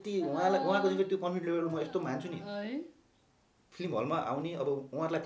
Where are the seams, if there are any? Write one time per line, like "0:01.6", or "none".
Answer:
none

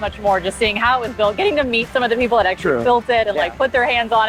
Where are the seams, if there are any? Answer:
none

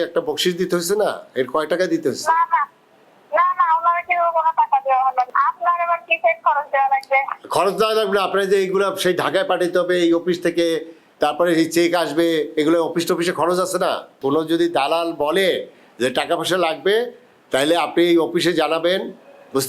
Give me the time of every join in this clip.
0:05.3
0:14.2

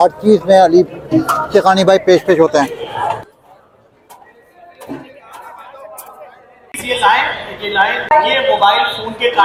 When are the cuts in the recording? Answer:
none

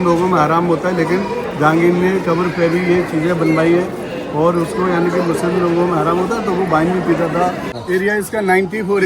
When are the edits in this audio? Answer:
0:07.6

